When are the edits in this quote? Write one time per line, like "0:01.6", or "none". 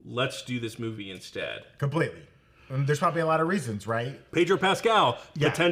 0:04.2